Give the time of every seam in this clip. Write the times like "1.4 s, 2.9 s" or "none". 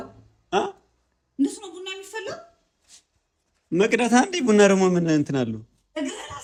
none